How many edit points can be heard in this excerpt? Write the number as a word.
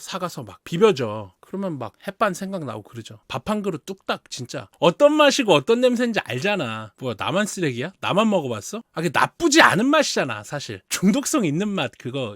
three